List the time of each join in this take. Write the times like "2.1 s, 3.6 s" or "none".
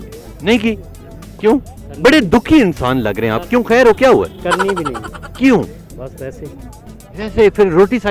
none